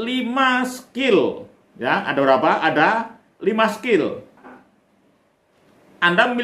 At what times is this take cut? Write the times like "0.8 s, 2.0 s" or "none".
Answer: 4.6 s

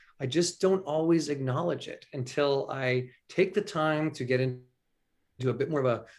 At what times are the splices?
none

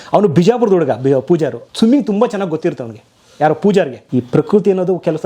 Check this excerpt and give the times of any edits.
1.6 s, 4.0 s

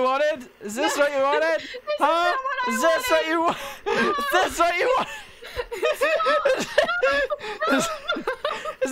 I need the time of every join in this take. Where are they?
none

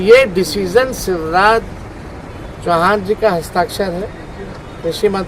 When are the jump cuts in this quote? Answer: none

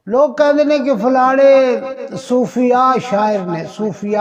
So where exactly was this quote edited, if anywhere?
none

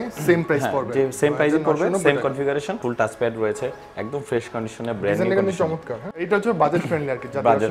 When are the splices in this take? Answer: 2.7 s, 6.1 s

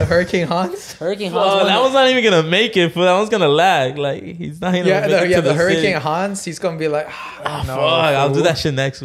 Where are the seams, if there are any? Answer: none

